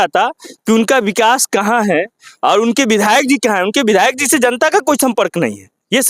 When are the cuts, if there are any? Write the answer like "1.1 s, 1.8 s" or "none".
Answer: none